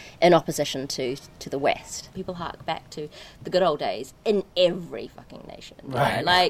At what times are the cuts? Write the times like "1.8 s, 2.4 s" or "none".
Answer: 2.1 s